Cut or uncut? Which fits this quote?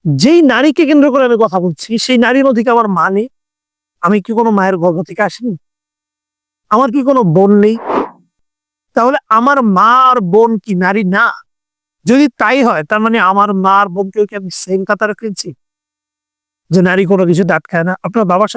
uncut